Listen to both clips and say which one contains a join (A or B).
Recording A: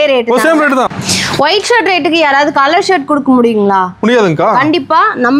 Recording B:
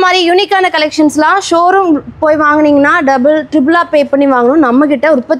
A